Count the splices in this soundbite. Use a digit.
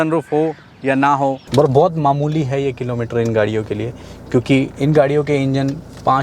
1